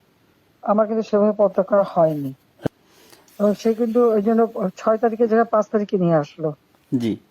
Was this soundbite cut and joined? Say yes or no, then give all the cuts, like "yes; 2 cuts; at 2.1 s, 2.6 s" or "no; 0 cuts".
yes; 1 cut; at 2.7 s